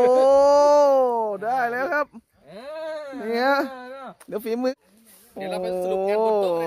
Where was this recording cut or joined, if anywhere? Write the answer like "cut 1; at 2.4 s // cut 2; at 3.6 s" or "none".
cut 1; at 4.7 s